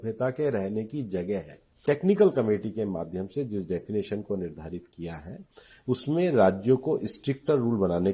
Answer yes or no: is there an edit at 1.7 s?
yes